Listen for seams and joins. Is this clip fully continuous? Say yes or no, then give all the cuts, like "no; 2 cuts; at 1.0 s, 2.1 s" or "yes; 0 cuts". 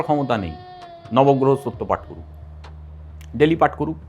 yes; 0 cuts